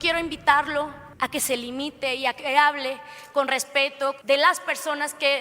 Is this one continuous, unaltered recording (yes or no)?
no